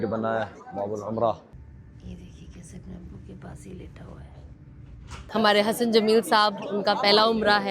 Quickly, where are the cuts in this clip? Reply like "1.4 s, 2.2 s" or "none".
1.6 s, 5.1 s